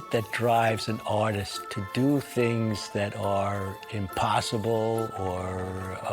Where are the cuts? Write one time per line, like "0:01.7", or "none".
0:01.5